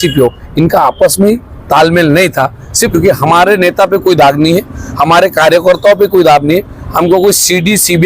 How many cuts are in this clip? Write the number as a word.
one